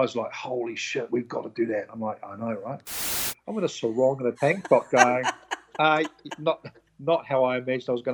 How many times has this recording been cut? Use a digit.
2